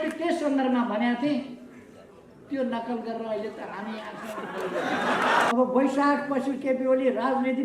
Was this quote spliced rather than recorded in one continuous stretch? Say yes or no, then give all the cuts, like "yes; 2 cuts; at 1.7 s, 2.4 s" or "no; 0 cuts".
yes; 1 cut; at 5.5 s